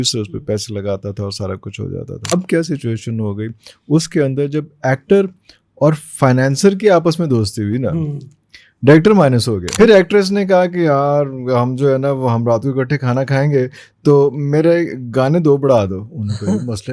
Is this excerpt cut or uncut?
cut